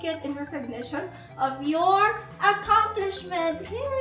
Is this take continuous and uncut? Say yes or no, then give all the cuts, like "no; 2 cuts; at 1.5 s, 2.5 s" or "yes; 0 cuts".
yes; 0 cuts